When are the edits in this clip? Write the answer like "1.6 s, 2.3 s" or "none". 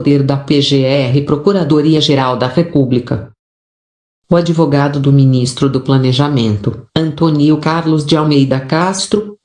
2.1 s